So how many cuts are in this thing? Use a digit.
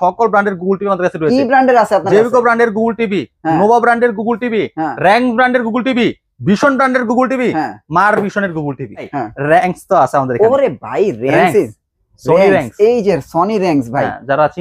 1